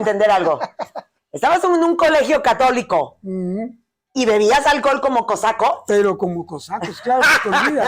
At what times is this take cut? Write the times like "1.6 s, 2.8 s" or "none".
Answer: none